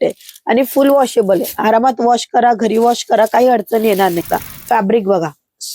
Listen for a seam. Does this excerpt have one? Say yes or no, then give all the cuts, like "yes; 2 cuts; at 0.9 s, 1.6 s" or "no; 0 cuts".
yes; 1 cut; at 4.4 s